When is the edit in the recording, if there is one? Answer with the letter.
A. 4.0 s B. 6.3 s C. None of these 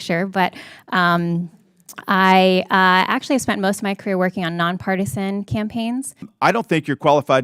B